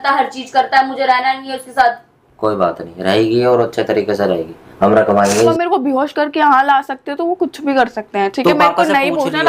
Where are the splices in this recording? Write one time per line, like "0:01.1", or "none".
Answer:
0:05.5